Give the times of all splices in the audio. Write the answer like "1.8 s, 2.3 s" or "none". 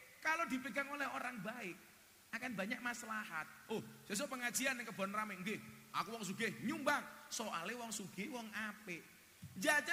none